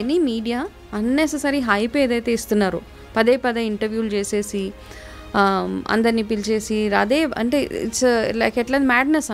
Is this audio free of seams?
yes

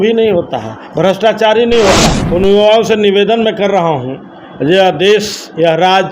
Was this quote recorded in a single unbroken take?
no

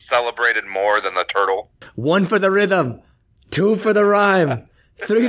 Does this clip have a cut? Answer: yes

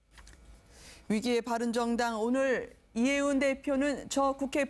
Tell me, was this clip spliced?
yes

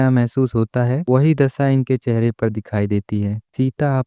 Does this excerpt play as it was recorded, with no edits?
yes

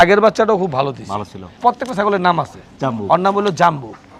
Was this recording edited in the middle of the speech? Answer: yes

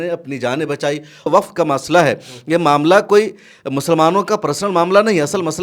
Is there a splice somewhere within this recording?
yes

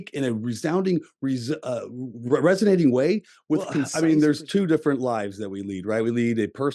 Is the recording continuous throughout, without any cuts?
no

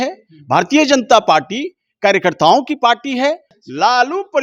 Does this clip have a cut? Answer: yes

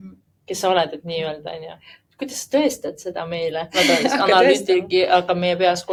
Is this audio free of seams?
yes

